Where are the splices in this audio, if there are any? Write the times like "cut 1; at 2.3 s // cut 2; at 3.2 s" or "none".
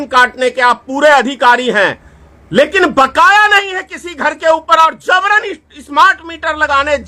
none